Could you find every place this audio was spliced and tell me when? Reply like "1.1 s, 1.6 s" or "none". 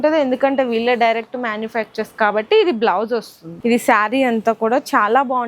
3.3 s